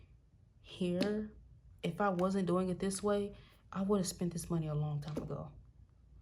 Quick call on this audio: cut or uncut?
uncut